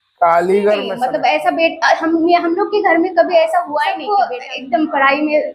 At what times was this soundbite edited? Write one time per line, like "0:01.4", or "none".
0:00.9
0:03.8